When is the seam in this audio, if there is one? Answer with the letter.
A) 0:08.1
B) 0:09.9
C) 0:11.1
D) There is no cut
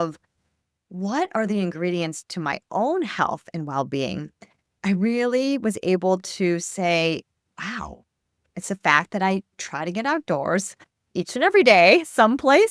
D